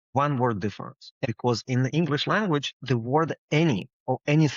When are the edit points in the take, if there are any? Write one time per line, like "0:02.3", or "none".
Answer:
0:01.2

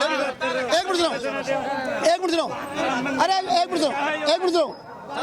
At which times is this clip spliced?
none

